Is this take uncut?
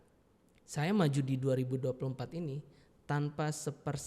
yes; 0 cuts

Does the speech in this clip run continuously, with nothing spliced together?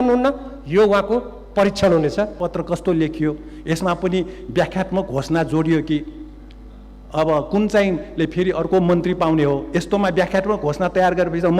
no; 1 cut; at 2.3 s

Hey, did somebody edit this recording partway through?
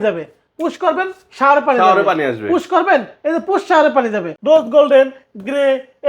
yes; 1 cut; at 4.3 s

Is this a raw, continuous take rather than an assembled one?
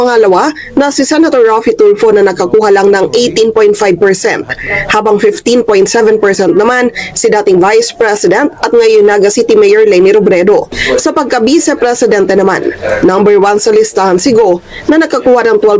no; 1 cut; at 10.8 s

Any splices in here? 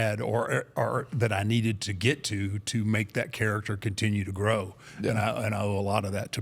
no; 0 cuts

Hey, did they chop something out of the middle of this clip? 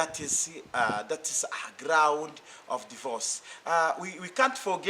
no; 0 cuts

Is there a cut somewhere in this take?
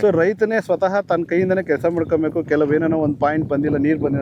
no; 0 cuts

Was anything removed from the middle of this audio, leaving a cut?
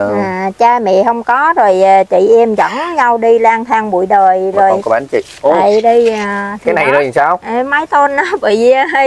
yes; 1 cut; at 4.8 s

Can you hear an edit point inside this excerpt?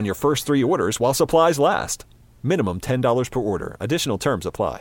no; 0 cuts

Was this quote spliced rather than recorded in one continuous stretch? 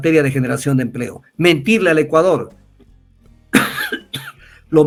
no; 0 cuts

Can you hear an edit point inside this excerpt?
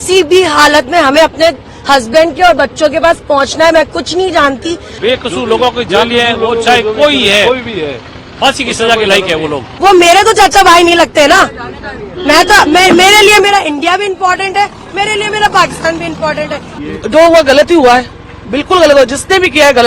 yes; 3 cuts; at 4.9 s, 9.7 s, 16.7 s

